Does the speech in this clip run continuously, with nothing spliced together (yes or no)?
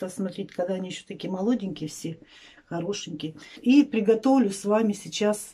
no